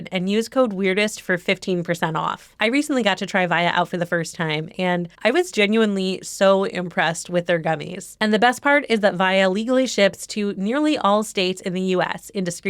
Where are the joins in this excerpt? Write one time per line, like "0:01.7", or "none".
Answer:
0:08.1